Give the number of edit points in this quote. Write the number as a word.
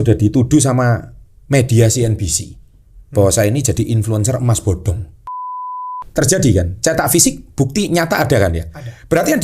one